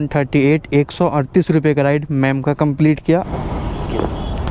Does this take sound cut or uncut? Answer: cut